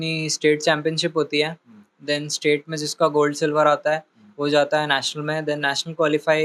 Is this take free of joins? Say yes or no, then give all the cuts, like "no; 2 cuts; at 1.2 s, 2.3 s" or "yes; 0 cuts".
yes; 0 cuts